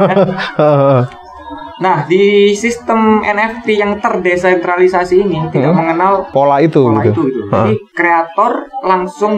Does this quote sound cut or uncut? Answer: cut